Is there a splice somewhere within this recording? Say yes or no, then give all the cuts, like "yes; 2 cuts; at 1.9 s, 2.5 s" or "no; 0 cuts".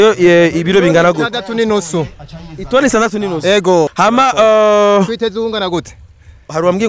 yes; 1 cut; at 3.9 s